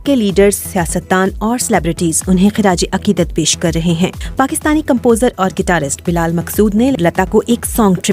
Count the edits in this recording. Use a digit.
1